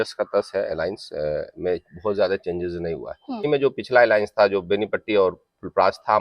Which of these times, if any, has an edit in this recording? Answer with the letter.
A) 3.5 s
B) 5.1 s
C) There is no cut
A